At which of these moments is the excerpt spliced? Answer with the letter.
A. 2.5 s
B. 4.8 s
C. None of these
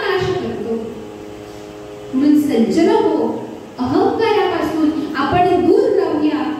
C